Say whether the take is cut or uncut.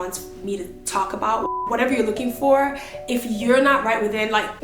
cut